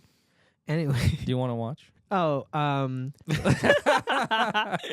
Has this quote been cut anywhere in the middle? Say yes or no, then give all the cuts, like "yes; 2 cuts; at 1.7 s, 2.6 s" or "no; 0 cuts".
yes; 1 cut; at 3.2 s